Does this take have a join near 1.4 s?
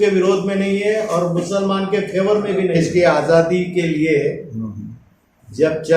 no; 1 cut; at 2.8 s

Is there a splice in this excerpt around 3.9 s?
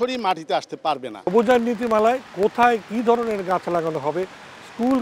no; 1 cut; at 1.2 s

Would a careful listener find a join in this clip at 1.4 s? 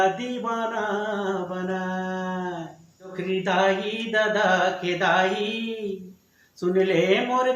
no; 1 cut; at 3.1 s

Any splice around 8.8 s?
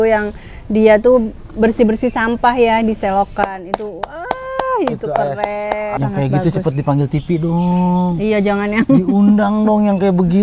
no; 1 cut; at 5.9 s

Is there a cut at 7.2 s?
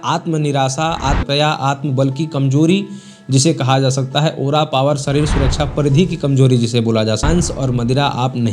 yes; 2 cuts; at 1.2 s, 7.2 s

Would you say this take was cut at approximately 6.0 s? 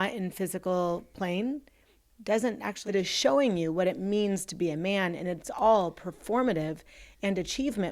no; 1 cut; at 2.7 s

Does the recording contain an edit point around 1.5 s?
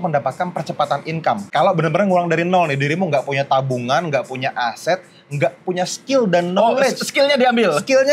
yes; 1 cut; at 1.5 s

